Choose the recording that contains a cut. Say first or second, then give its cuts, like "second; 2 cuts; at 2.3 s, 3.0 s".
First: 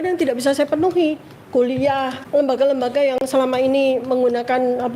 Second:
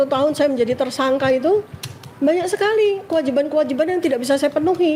first; 1 cut; at 2.2 s